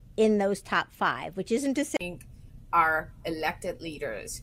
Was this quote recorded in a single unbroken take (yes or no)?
yes